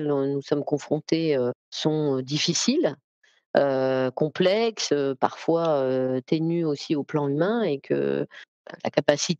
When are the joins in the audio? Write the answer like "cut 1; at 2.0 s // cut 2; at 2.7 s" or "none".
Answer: cut 1; at 1.7 s